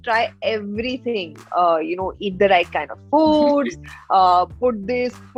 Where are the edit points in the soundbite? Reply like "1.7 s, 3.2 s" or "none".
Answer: none